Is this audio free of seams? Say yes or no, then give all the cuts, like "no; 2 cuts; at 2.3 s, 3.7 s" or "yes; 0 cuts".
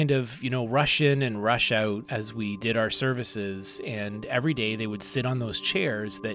no; 1 cut; at 2.1 s